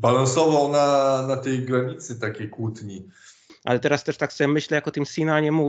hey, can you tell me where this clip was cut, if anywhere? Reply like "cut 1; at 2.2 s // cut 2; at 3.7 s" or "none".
cut 1; at 3.5 s

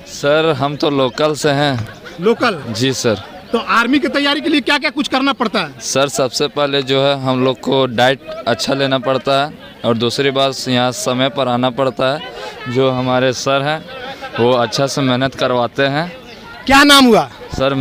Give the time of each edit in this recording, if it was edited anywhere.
none

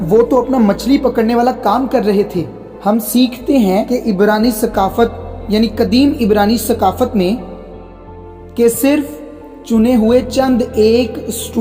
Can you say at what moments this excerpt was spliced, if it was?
none

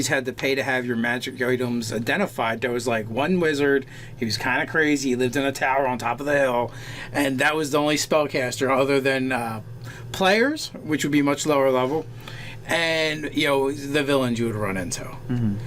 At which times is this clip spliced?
cut 1; at 2.1 s

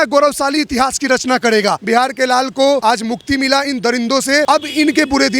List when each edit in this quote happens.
cut 1; at 1.8 s // cut 2; at 2.8 s // cut 3; at 4.5 s

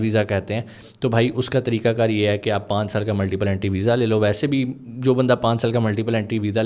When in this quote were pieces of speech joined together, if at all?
none

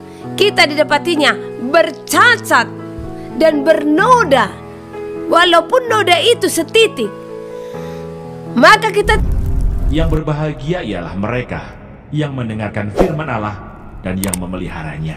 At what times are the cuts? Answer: cut 1; at 9.2 s

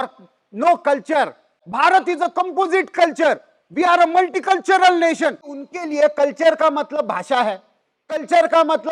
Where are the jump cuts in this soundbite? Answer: cut 1; at 1.6 s // cut 2; at 5.5 s

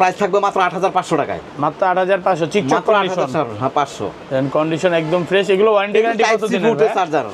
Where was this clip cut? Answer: none

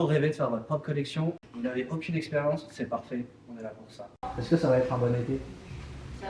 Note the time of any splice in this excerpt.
cut 1; at 1.5 s // cut 2; at 4.3 s

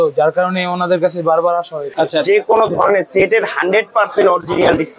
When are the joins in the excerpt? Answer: cut 1; at 1.8 s

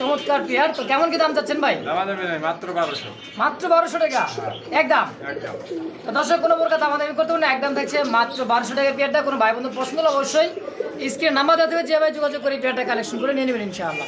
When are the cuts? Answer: none

